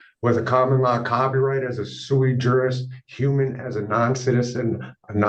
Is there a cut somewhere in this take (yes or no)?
no